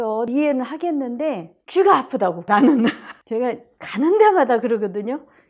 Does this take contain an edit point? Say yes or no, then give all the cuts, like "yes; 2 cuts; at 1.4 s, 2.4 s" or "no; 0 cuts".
yes; 1 cut; at 2.5 s